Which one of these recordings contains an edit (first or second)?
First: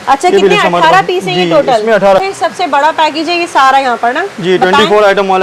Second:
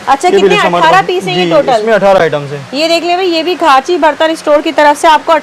first